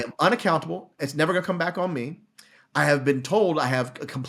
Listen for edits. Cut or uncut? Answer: cut